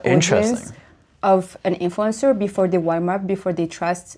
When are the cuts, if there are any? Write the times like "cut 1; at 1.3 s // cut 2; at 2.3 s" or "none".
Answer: none